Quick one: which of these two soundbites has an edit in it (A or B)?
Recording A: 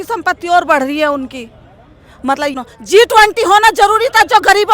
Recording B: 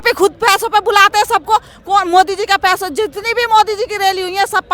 A